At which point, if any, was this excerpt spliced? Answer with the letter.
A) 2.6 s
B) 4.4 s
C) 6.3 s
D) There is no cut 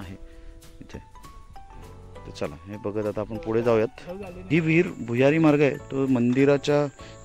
B